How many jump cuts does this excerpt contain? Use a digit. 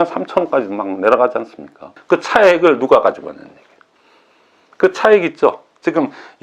1